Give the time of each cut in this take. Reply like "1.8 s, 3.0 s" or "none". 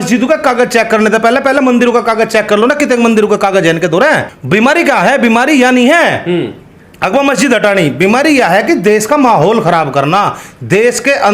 4.3 s